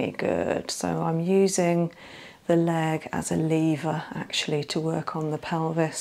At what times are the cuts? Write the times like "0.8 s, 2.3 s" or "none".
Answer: none